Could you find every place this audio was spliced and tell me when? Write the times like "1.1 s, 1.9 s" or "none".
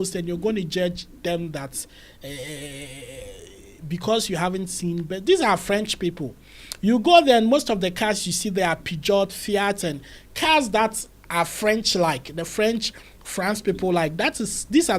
none